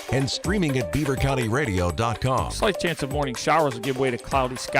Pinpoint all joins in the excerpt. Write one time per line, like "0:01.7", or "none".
0:02.5